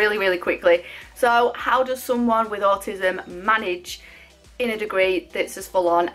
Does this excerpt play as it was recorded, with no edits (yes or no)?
no